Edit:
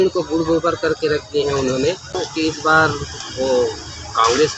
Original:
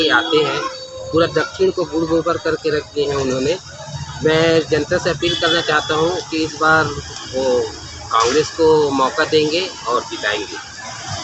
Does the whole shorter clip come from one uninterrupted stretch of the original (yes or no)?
no